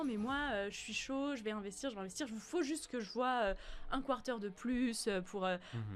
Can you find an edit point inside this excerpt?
no; 0 cuts

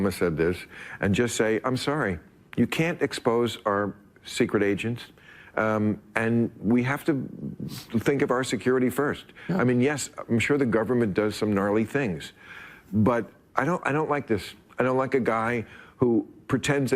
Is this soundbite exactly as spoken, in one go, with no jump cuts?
yes; 0 cuts

